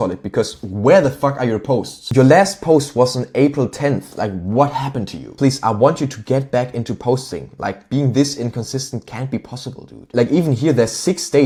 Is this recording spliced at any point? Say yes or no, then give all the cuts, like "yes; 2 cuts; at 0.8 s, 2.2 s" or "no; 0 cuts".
no; 0 cuts